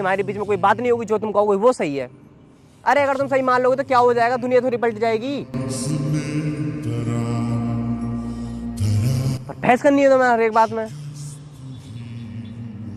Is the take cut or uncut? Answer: uncut